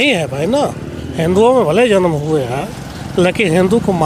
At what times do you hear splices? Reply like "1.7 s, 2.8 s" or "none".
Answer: none